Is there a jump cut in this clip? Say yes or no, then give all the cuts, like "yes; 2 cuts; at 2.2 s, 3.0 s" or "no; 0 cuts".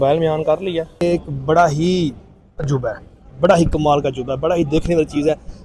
yes; 1 cut; at 1.0 s